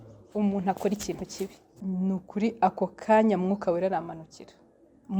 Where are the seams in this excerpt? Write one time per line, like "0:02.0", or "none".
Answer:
0:01.8